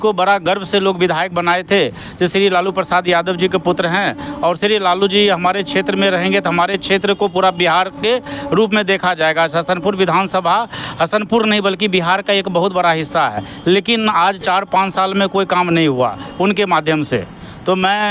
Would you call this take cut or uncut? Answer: uncut